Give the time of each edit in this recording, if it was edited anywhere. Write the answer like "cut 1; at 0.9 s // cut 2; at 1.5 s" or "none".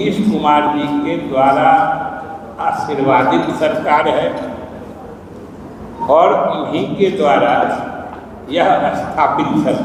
none